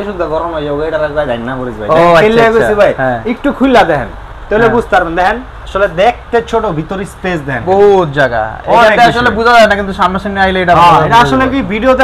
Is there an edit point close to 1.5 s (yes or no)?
no